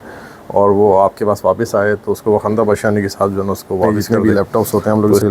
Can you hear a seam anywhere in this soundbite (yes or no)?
yes